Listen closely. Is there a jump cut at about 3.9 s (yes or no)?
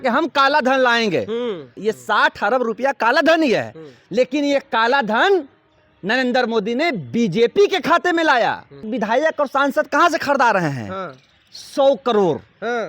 no